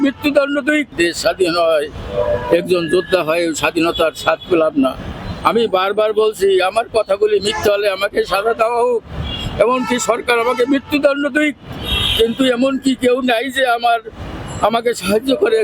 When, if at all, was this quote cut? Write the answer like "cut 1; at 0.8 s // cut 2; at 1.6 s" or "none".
cut 1; at 0.9 s